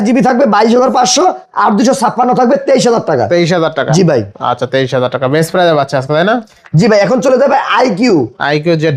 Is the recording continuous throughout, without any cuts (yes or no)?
yes